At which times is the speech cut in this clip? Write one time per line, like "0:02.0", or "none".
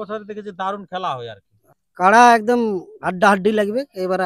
0:01.6